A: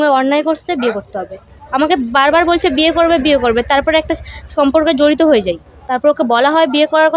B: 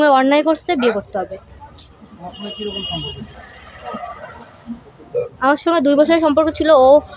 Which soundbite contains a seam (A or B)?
A